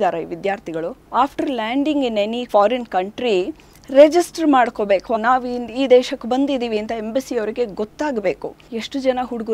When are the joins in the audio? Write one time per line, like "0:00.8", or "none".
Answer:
0:01.0
0:05.2
0:08.5

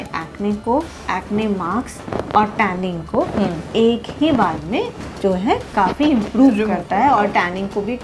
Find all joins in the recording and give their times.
none

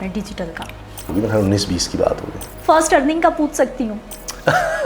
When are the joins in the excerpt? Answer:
0:01.1
0:02.4

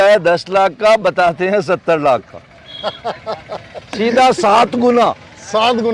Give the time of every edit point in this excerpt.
none

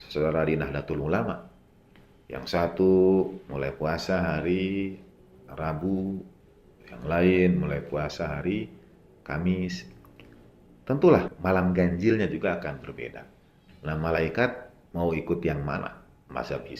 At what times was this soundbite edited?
0:11.3

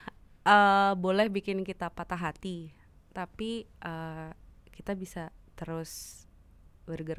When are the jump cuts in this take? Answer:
none

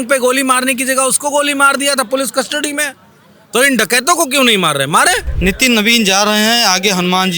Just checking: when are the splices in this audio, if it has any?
0:05.3

